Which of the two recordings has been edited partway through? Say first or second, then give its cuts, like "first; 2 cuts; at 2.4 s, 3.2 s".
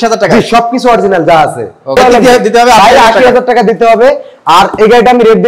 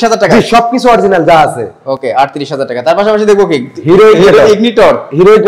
first; 1 cut; at 2.0 s